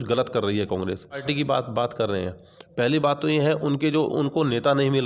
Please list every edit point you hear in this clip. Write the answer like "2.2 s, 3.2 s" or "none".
1.3 s